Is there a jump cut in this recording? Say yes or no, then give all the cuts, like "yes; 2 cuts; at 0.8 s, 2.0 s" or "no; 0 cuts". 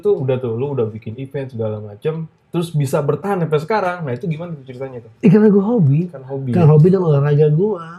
no; 0 cuts